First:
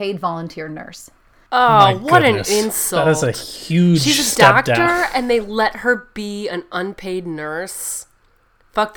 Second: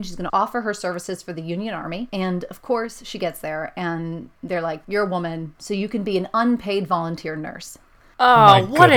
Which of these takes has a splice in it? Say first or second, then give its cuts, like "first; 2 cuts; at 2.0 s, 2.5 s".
second; 2 cuts; at 2.1 s, 5.5 s